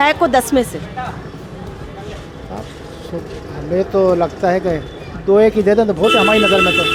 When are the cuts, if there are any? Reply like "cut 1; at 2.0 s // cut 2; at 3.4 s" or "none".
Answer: none